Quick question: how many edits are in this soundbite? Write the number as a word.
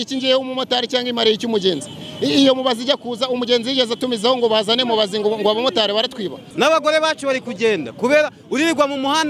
one